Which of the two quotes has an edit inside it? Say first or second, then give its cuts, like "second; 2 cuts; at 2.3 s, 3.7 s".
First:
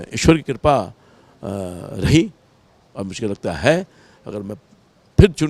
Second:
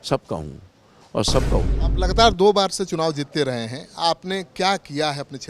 second; 1 cut; at 1.8 s